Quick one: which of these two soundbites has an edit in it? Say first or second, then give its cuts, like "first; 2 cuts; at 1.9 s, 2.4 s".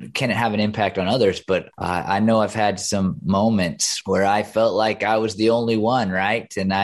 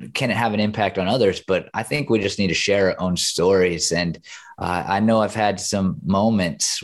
first; 2 cuts; at 1.7 s, 3.8 s